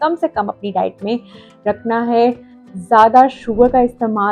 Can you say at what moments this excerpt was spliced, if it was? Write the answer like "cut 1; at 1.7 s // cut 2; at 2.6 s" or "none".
none